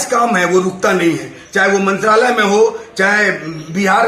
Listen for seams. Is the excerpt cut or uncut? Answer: uncut